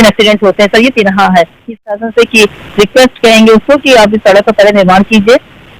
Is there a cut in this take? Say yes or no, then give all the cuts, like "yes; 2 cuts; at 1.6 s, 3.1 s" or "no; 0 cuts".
yes; 1 cut; at 1.7 s